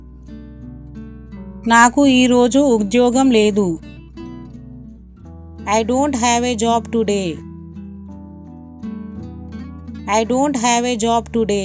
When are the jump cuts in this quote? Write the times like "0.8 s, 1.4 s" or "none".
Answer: 1.6 s, 3.8 s, 5.6 s, 7.6 s, 10.0 s